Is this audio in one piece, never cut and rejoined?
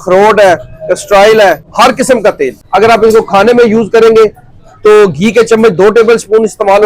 no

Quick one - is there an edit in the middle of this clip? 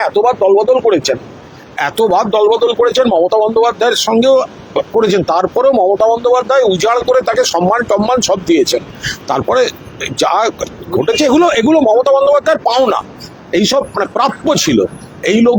no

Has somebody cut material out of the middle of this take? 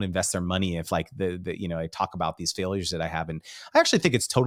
no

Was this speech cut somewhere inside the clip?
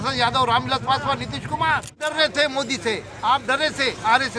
yes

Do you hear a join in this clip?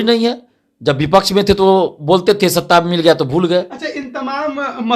no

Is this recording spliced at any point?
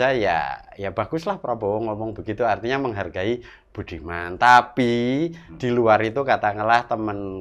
no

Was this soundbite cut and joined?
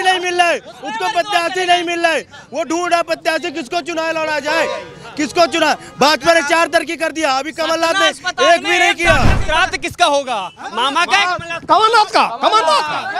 yes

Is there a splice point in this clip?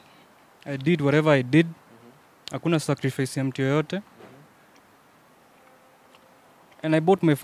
no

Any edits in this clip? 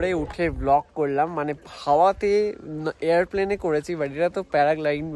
no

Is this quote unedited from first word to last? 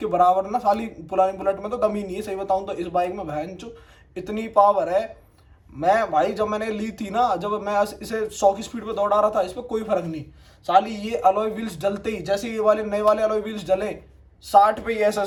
yes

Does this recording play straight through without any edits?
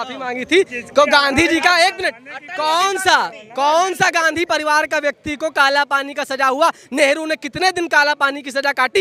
yes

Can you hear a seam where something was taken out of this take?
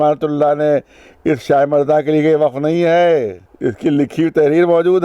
yes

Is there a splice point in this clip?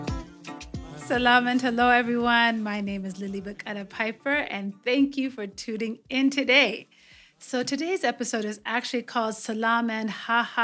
yes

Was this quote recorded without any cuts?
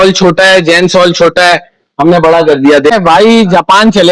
no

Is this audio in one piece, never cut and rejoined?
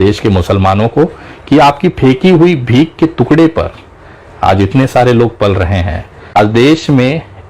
no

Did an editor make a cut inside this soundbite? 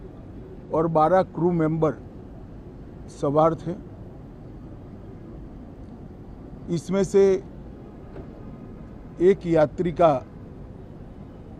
no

